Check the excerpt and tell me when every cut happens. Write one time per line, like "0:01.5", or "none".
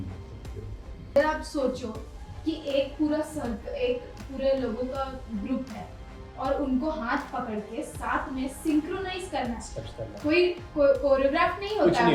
0:01.2